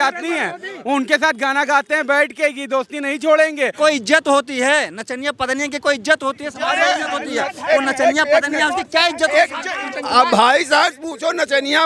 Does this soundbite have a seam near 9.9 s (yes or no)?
yes